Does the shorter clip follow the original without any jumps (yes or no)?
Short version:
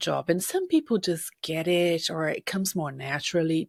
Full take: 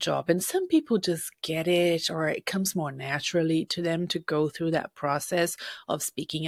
yes